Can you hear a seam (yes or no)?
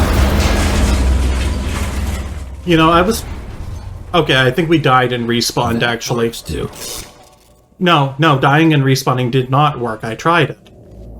no